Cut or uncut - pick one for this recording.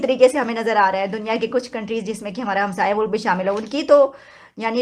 uncut